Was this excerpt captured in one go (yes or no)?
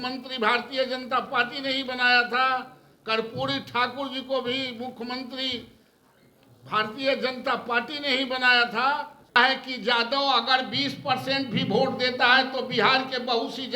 no